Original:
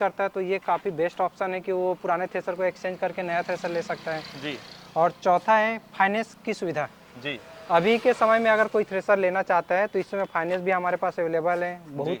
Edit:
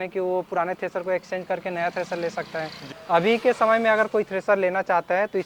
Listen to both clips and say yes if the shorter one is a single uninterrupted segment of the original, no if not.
no